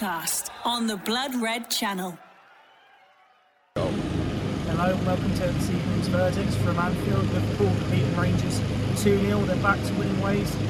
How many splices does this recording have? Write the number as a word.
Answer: one